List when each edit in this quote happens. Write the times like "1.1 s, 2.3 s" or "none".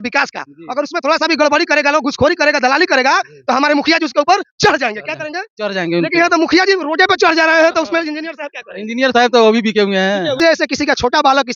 10.4 s